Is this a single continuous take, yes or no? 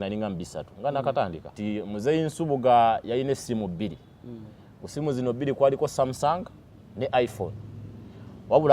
no